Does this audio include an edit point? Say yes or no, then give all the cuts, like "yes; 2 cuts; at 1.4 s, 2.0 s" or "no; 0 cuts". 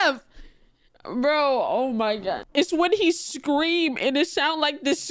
yes; 1 cut; at 2.4 s